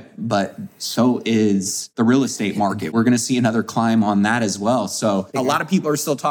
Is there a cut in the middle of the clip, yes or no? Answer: yes